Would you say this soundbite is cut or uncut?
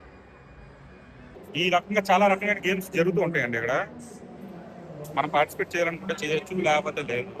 cut